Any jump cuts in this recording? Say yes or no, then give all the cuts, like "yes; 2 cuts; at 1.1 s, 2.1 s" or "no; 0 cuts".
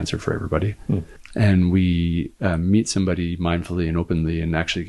yes; 1 cut; at 1.2 s